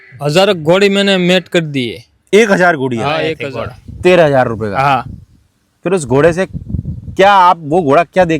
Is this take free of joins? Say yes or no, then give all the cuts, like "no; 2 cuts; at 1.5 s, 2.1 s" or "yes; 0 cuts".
no; 1 cut; at 3.4 s